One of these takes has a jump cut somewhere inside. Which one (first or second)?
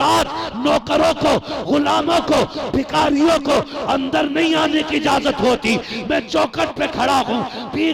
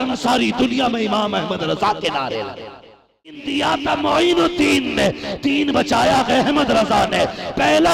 second